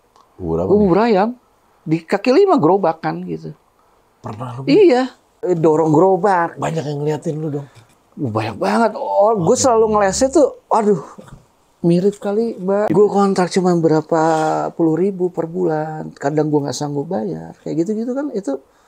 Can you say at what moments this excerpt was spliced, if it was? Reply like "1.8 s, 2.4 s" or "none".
5.4 s, 12.9 s